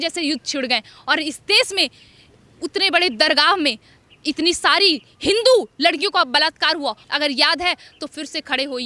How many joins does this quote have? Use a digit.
1